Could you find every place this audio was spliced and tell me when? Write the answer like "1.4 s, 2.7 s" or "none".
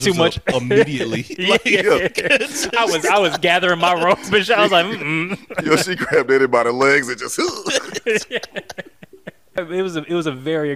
9.6 s